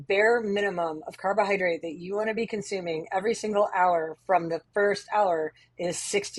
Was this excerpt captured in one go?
yes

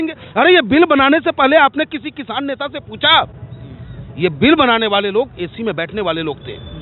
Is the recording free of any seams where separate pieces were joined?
yes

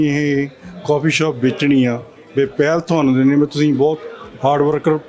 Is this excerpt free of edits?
yes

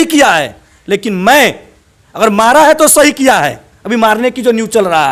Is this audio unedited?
yes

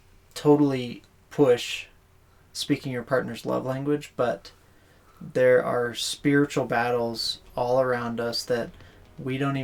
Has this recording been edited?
no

